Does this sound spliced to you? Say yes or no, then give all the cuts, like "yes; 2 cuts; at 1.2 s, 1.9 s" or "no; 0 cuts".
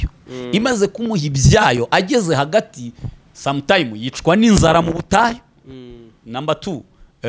no; 0 cuts